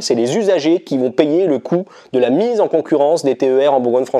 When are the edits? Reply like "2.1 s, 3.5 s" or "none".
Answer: none